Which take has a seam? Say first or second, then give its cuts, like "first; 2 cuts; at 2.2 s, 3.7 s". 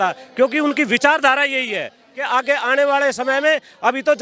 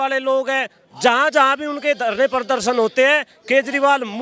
first; 1 cut; at 2.1 s